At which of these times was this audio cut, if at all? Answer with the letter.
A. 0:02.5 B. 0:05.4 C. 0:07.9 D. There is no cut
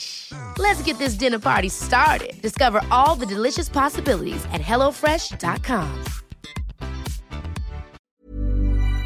C